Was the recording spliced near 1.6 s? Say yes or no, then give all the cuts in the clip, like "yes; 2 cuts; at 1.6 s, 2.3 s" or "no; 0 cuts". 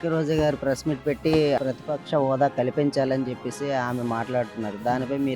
yes; 1 cut; at 1.6 s